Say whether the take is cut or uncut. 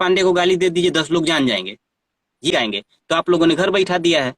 cut